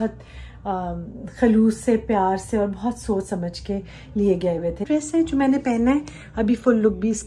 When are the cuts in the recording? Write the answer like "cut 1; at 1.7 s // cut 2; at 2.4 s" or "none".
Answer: cut 1; at 4.8 s